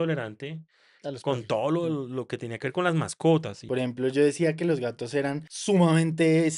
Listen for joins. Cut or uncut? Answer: cut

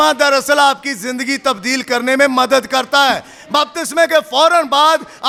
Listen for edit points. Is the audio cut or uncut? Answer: uncut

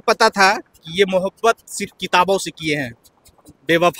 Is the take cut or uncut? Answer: uncut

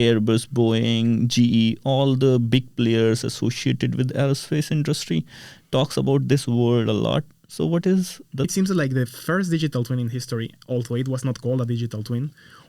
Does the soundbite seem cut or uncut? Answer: cut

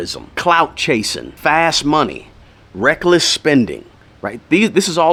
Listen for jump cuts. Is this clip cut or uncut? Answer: uncut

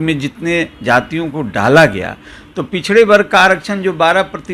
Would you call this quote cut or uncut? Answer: uncut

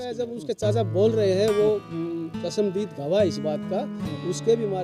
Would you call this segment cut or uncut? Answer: uncut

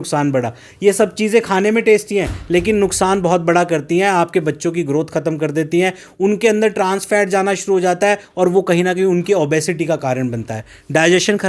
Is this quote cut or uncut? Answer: uncut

